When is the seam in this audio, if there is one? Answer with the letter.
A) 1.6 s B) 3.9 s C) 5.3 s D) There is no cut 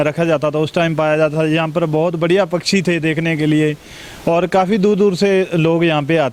D